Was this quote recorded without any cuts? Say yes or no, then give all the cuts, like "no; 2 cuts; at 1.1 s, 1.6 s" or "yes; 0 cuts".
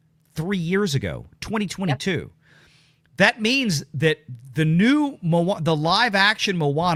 yes; 0 cuts